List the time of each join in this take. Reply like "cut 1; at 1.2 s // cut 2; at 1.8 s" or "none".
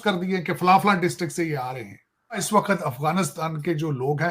cut 1; at 2.5 s